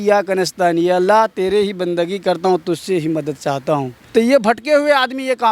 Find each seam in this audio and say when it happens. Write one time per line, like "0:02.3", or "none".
0:04.0